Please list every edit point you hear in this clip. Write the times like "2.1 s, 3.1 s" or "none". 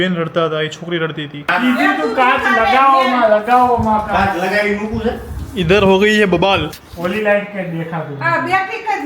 1.5 s, 6.8 s